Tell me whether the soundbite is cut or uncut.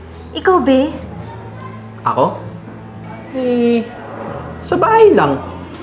uncut